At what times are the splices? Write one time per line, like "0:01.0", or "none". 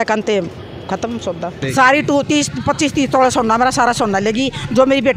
0:01.7